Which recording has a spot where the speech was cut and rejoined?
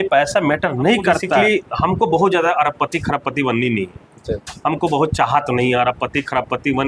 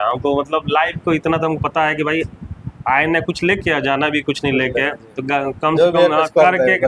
first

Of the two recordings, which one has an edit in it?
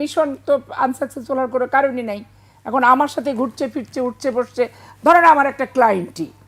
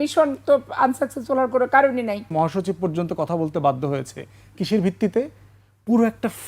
second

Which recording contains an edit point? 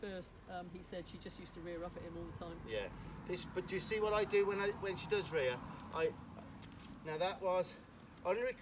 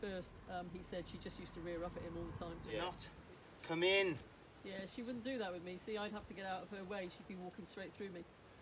second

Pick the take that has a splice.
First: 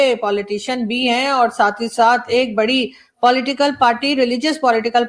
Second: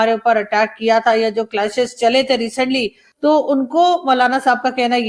second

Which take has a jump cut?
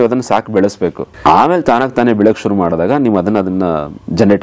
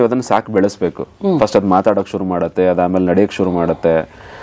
first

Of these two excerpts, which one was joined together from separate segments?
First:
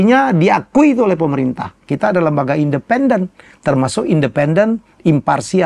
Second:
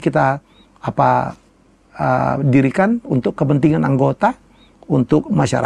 first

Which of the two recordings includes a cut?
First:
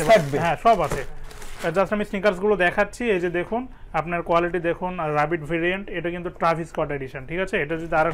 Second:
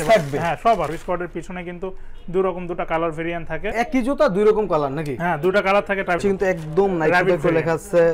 second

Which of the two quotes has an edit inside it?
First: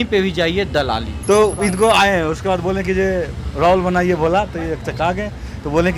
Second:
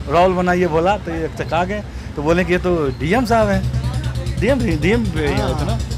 first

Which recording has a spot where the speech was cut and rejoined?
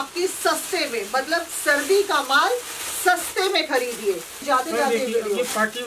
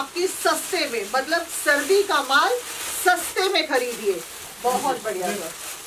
first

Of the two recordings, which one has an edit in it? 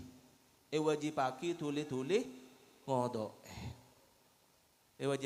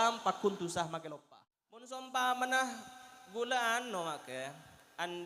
second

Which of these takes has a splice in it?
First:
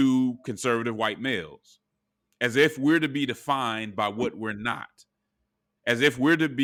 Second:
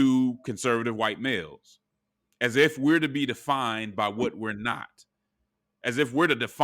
second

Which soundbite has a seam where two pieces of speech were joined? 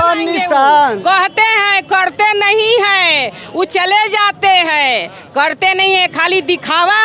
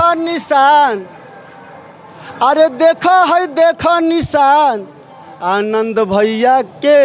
first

